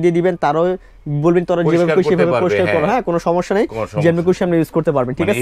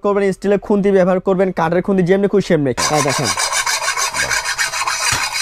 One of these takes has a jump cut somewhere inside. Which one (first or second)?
second